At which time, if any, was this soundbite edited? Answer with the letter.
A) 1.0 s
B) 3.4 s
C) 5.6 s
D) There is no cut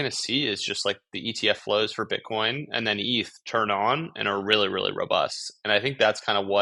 D